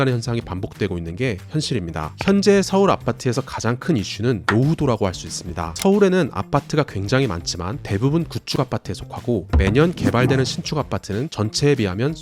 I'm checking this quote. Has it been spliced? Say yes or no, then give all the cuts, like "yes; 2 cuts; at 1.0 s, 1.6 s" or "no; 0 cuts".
yes; 1 cut; at 2.1 s